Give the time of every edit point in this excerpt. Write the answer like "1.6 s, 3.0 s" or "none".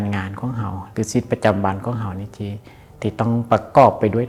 none